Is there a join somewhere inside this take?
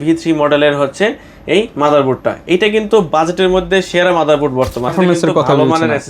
yes; 1 cut; at 4.9 s

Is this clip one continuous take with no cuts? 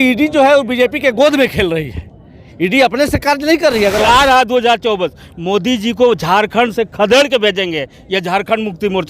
no; 2 cuts; at 4.0 s, 7.2 s

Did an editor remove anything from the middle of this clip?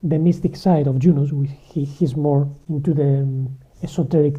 no; 0 cuts

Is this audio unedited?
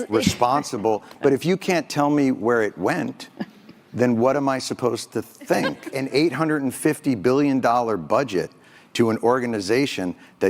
no; 1 cut; at 5.8 s

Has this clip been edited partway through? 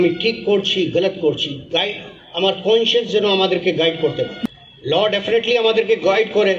yes; 1 cut; at 4.3 s

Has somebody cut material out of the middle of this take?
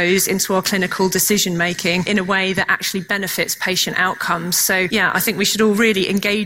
yes; 2 cuts; at 2.1 s, 4.9 s

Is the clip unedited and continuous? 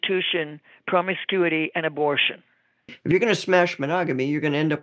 no; 1 cut; at 2.9 s

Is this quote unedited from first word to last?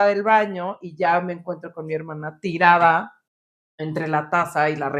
yes; 0 cuts

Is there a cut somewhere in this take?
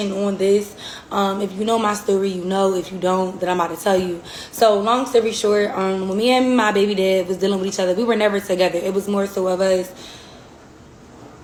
no; 0 cuts

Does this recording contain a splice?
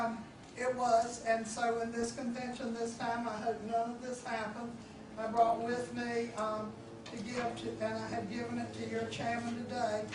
no; 0 cuts

